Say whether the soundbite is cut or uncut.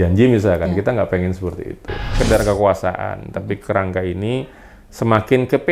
cut